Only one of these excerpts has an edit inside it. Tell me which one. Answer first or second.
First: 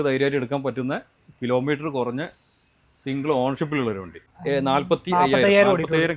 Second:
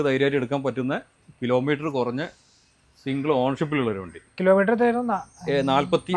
first